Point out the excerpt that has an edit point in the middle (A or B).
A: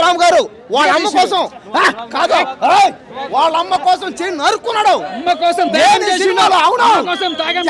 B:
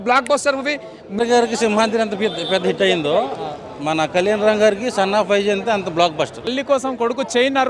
B